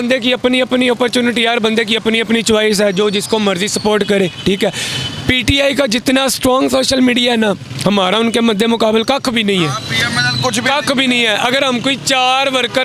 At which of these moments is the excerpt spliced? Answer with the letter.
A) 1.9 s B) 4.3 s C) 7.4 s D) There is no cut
D